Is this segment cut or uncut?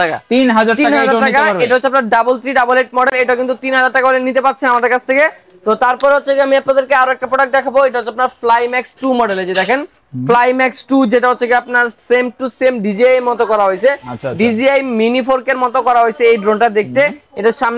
uncut